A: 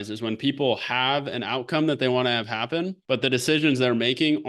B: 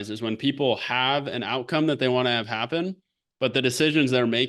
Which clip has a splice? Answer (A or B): A